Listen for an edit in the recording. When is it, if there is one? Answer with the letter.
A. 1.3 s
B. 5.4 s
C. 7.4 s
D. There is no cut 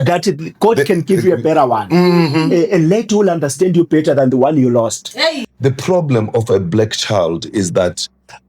B